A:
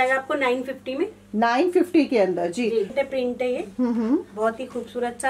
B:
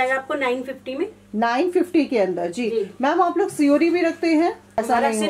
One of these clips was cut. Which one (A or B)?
A